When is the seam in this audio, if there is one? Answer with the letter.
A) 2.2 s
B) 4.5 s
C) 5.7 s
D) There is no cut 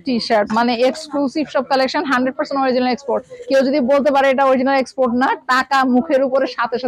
D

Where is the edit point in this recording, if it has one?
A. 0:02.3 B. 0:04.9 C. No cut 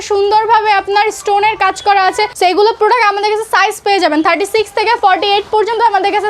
A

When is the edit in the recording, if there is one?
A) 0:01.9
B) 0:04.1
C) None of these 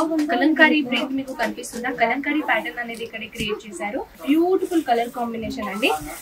B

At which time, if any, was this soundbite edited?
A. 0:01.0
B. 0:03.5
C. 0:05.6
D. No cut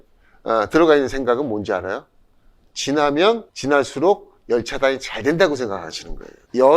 B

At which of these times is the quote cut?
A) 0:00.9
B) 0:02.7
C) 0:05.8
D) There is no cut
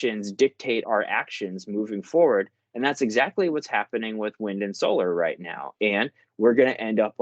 A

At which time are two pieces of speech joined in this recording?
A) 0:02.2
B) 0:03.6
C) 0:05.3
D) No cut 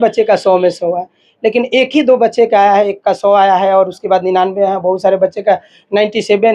D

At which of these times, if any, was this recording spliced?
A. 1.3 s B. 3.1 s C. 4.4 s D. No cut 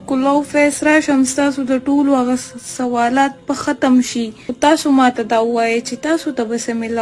C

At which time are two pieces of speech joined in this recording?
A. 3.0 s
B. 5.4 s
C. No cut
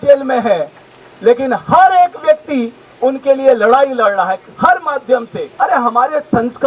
B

